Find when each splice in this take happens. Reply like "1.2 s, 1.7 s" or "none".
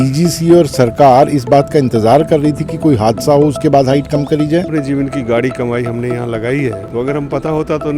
4.7 s